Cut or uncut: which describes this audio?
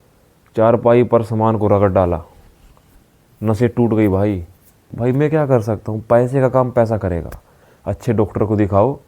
cut